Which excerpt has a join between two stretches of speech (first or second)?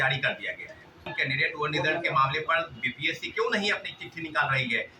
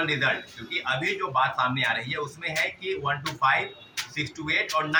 first